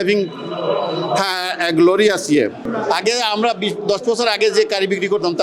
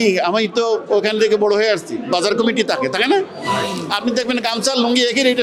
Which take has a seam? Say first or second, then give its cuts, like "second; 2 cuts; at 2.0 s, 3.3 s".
first; 1 cut; at 2.6 s